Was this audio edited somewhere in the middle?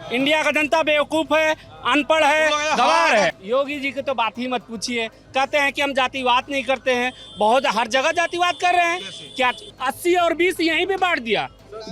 yes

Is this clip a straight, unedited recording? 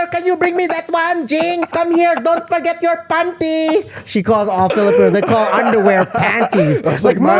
no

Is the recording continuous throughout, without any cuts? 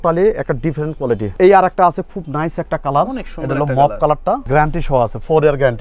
no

